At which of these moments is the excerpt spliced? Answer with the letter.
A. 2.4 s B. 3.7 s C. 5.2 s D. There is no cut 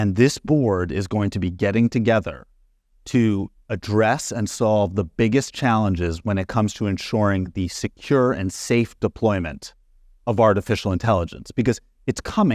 D